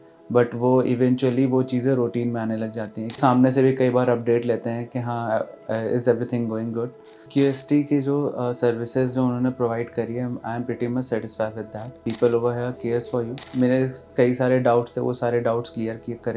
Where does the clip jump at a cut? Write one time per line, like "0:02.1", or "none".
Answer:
0:03.2
0:07.2
0:11.9
0:13.4

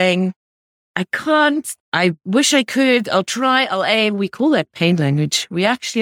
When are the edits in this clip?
0:01.7

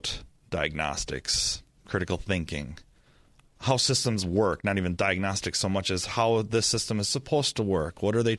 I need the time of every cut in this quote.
none

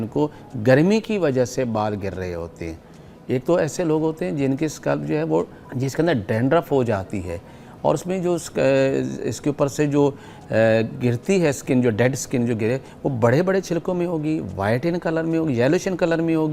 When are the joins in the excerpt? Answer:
0:05.6

